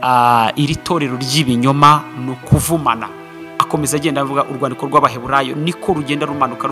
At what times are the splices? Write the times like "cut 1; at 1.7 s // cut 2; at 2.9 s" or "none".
cut 1; at 3.4 s